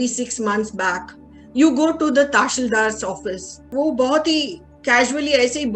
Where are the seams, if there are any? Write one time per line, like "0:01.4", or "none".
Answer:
0:03.7